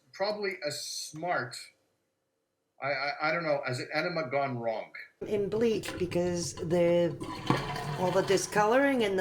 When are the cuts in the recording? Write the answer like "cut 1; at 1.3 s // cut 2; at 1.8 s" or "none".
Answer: cut 1; at 5.2 s